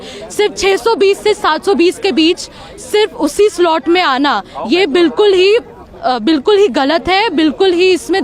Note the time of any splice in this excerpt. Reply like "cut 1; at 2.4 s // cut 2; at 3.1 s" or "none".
none